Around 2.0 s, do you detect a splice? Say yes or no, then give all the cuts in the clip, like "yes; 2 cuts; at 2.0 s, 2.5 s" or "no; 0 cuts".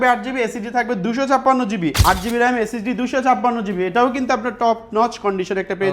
yes; 1 cut; at 2.0 s